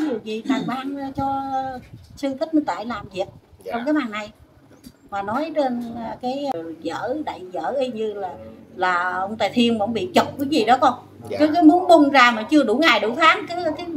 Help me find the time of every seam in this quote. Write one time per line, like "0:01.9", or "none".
0:06.5